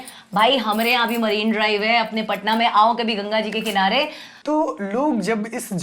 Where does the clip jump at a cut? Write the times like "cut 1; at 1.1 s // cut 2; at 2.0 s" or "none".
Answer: cut 1; at 4.3 s